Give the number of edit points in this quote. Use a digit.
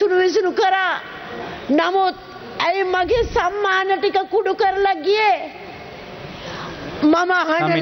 0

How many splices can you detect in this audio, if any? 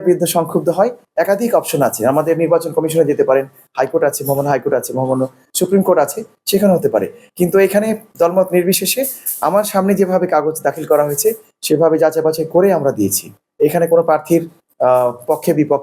0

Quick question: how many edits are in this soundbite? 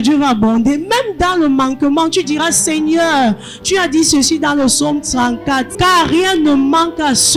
1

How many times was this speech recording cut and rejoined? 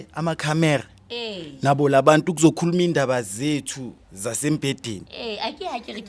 0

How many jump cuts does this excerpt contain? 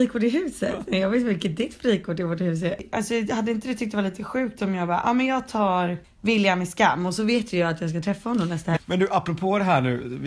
3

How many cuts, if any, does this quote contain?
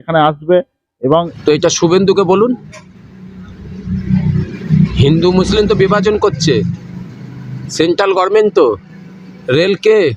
1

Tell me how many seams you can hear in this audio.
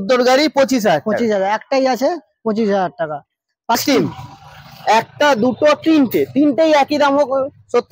1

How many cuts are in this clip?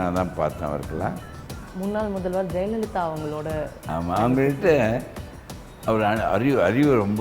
1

